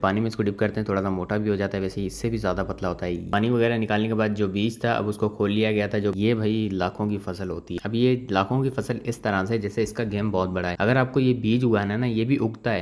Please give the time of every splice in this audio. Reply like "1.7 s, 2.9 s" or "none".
3.3 s, 6.1 s, 7.8 s